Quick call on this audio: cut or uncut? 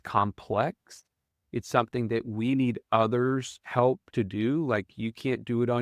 uncut